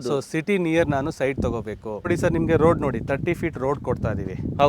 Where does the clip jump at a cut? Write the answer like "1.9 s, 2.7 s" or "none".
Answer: 2.1 s